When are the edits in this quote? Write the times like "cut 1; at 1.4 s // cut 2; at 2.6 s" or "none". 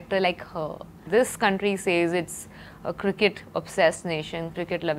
cut 1; at 1.0 s